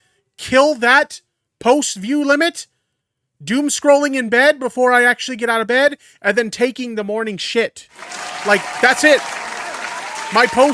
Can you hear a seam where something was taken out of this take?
no; 0 cuts

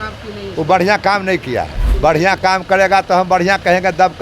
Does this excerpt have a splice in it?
yes; 1 cut; at 1.8 s

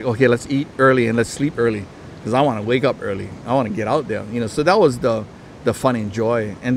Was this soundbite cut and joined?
no; 0 cuts

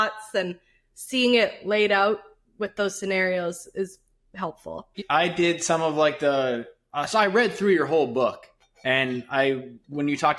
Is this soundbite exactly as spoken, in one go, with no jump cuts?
no; 1 cut; at 5.0 s

